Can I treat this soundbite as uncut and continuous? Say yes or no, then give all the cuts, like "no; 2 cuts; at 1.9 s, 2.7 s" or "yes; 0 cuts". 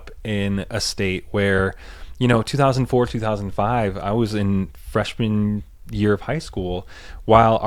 yes; 0 cuts